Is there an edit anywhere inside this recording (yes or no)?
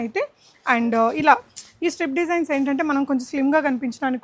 no